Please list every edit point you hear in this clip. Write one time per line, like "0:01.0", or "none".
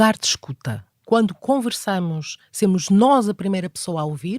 0:01.0